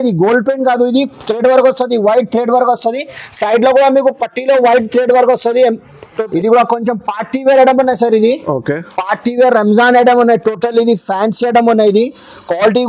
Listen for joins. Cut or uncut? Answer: cut